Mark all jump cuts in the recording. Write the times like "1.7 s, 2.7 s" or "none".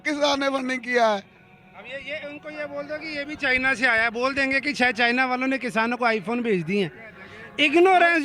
none